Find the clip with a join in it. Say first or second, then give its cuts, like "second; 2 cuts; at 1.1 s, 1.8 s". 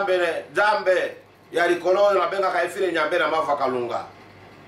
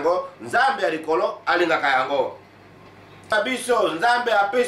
second; 1 cut; at 3.3 s